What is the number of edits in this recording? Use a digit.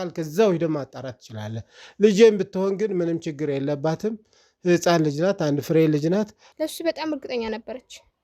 1